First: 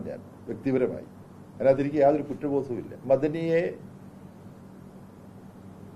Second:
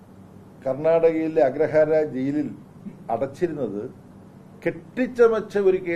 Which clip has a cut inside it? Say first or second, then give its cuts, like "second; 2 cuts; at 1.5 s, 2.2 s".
first; 1 cut; at 2.9 s